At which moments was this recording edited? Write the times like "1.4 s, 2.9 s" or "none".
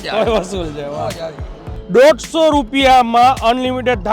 1.8 s